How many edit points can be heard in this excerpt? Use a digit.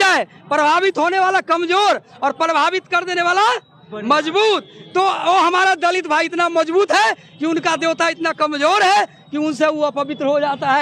0